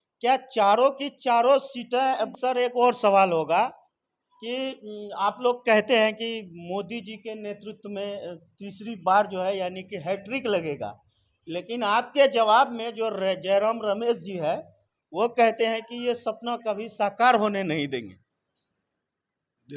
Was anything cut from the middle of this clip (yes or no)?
yes